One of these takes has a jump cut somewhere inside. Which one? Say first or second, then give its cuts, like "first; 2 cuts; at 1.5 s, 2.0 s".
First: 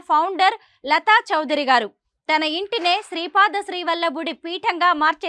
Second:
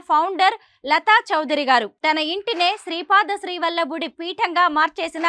second; 1 cut; at 1.9 s